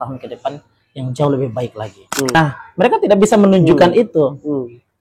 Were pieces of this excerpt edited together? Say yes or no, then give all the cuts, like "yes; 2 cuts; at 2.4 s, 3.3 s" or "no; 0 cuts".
yes; 1 cut; at 2.3 s